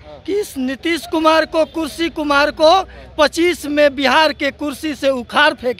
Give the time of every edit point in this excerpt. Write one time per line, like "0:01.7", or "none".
none